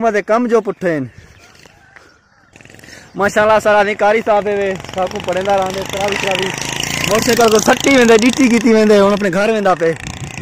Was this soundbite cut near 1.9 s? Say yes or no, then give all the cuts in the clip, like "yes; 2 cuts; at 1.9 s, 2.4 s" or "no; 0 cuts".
no; 0 cuts